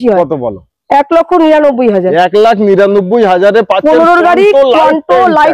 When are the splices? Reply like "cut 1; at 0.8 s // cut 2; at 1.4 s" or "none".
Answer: none